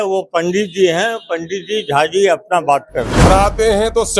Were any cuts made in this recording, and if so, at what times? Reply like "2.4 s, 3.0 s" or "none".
3.3 s